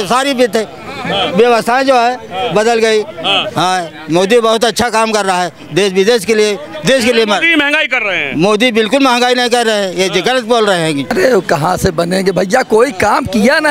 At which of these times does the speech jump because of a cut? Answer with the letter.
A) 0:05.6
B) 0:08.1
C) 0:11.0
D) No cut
C